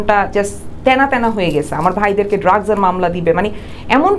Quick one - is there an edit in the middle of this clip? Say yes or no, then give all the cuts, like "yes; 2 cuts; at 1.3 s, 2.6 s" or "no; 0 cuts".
no; 0 cuts